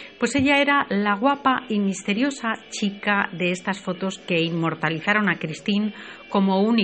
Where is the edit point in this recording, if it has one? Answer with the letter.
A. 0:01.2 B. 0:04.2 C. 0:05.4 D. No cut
C